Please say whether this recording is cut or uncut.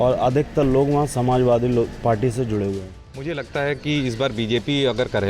cut